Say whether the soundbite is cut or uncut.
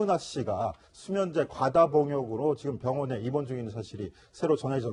uncut